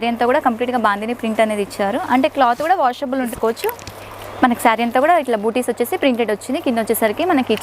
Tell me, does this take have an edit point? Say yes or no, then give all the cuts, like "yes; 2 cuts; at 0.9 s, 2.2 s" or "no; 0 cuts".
yes; 1 cut; at 3.3 s